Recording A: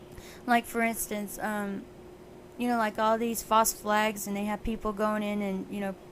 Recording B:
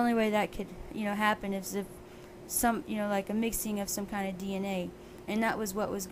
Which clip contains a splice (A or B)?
A